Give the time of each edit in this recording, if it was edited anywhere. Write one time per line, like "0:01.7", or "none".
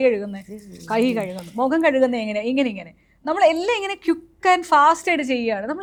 none